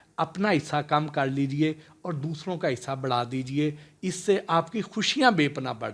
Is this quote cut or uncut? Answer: uncut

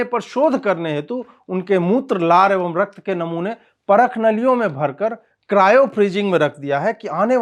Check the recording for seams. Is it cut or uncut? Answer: uncut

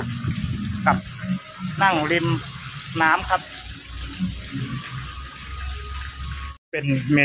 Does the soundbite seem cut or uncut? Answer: uncut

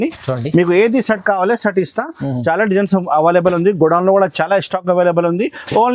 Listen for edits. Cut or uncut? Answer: uncut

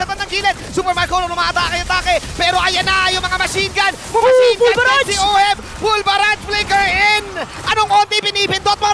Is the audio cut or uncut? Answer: uncut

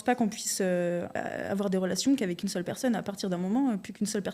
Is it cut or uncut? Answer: cut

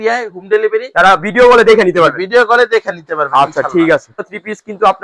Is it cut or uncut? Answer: cut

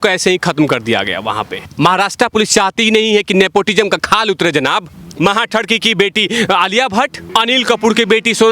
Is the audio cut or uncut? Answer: cut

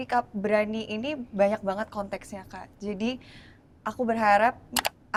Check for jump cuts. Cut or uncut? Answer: uncut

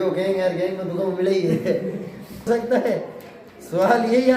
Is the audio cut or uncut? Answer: cut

